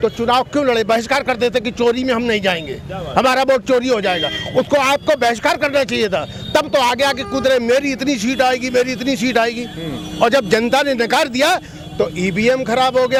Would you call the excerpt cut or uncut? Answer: uncut